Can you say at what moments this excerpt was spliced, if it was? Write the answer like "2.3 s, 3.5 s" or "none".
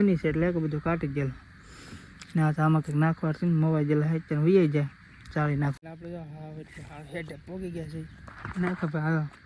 5.8 s